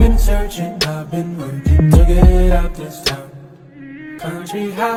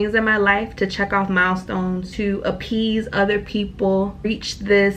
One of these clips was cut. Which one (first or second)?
second